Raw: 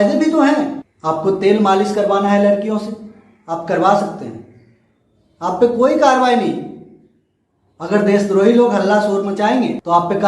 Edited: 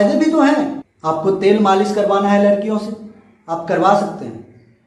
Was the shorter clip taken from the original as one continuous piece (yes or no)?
yes